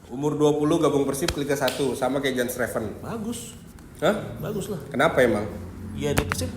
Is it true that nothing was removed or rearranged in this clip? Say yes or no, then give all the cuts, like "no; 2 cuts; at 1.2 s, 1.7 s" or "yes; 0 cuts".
yes; 0 cuts